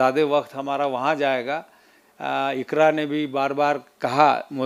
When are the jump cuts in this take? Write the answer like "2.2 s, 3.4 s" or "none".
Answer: none